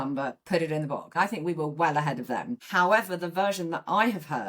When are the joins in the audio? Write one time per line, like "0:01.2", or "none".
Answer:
0:01.1
0:02.6

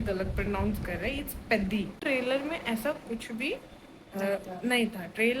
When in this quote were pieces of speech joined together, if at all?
0:02.0

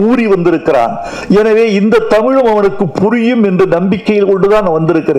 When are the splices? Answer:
none

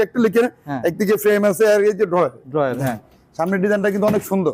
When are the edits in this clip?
none

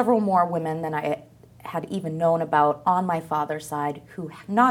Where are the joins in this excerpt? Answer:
none

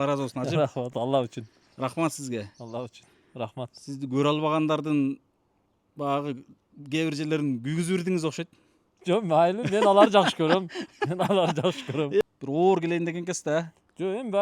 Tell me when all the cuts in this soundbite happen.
0:12.2

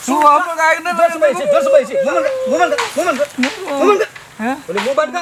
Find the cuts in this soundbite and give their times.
none

